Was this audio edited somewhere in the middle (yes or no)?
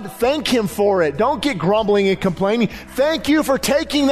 yes